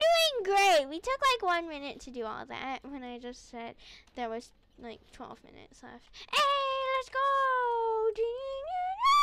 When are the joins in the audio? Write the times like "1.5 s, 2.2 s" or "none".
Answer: none